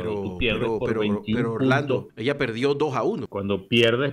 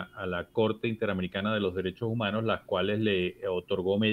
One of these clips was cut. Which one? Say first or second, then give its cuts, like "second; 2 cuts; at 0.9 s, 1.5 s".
first; 2 cuts; at 2.1 s, 3.3 s